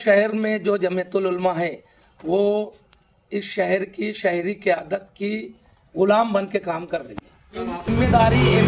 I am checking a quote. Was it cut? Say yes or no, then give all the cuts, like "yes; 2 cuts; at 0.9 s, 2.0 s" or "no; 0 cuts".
yes; 1 cut; at 7.6 s